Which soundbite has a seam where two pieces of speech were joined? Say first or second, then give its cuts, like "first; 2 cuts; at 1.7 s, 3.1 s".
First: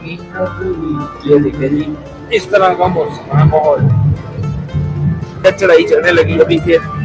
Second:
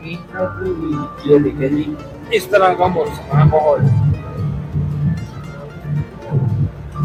first; 1 cut; at 5.4 s